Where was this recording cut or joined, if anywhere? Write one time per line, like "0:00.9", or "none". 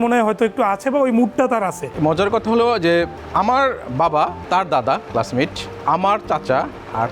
0:01.8
0:03.2
0:04.4
0:05.7